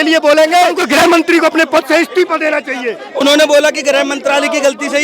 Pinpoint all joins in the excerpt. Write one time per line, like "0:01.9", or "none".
0:00.8
0:03.0